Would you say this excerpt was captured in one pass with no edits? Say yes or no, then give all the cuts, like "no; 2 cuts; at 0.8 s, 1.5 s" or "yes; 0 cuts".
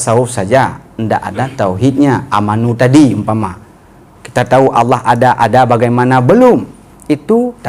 yes; 0 cuts